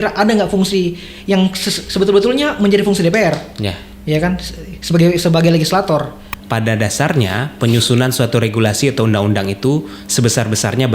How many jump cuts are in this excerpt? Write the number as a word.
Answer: one